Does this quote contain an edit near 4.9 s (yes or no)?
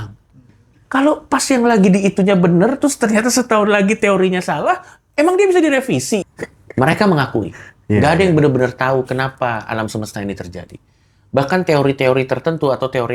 no